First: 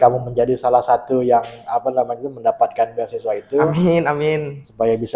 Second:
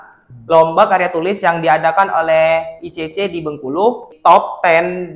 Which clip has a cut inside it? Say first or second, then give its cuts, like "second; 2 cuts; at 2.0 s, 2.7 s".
second; 1 cut; at 4.1 s